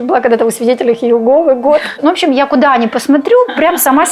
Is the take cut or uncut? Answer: cut